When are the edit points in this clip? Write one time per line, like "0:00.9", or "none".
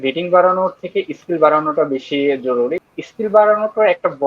0:02.8